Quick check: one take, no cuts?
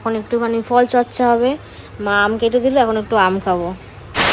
yes; 0 cuts

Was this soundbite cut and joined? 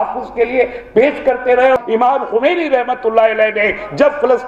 yes; 1 cut; at 1.8 s

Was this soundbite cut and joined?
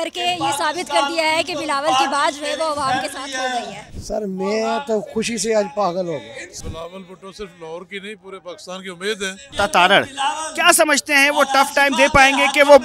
yes; 3 cuts; at 3.8 s, 6.6 s, 9.5 s

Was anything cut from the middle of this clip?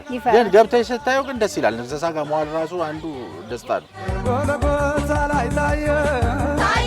yes; 1 cut; at 3.9 s

